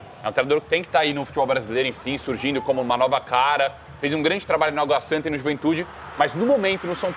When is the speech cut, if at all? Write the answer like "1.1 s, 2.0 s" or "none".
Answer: none